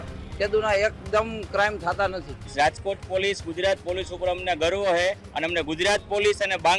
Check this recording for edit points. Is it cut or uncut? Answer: cut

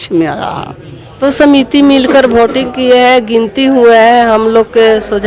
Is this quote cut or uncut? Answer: cut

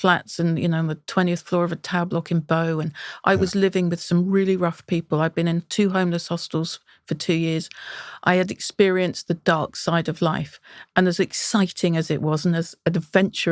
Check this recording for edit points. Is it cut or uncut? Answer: uncut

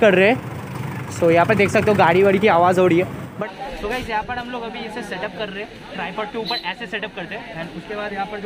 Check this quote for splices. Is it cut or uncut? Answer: cut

